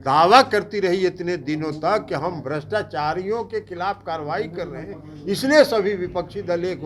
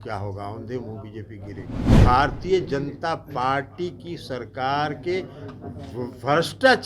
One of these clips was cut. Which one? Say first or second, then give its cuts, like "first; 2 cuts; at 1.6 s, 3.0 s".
second; 1 cut; at 1.9 s